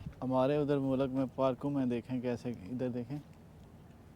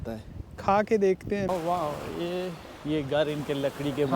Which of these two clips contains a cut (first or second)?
second